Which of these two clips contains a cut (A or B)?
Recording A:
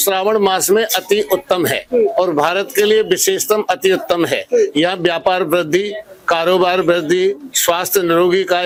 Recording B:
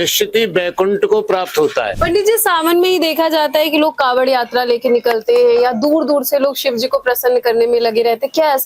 B